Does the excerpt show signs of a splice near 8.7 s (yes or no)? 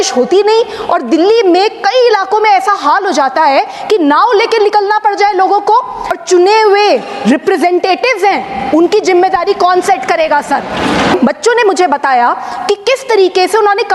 no